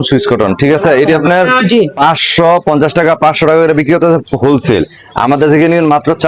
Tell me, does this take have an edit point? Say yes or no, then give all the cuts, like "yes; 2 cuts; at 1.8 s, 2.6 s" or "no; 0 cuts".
no; 0 cuts